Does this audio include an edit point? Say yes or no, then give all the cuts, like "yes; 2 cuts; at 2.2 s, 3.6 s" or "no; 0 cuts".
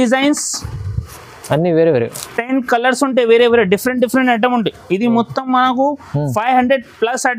no; 0 cuts